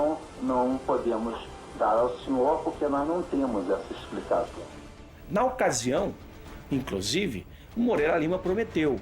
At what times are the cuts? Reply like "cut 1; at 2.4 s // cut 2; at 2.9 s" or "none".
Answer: cut 1; at 7.1 s